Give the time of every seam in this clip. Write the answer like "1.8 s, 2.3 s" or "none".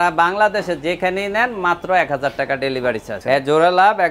3.1 s

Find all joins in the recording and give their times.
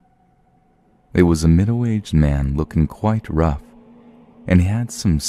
none

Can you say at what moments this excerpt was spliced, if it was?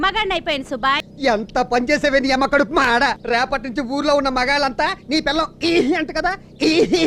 1.0 s, 3.2 s

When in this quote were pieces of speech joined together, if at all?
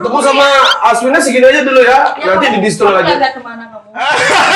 none

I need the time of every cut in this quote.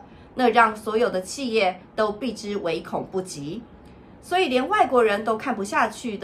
none

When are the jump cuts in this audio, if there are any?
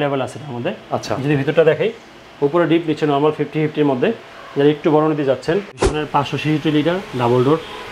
5.7 s

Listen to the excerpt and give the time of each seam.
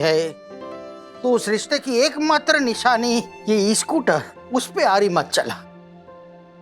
none

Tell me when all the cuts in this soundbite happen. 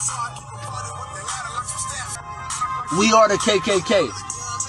2.2 s

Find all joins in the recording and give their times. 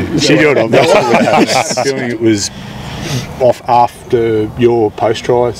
1.9 s

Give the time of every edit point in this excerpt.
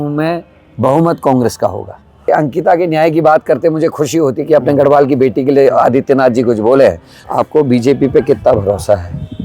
2.2 s, 7.1 s

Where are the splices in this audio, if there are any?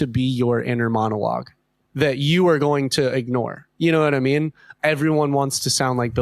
4.6 s

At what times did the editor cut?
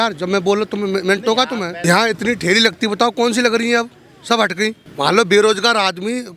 1.8 s, 4.8 s

